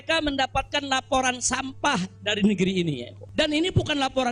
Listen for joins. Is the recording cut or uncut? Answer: cut